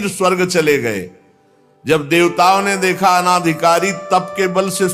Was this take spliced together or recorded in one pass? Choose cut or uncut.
uncut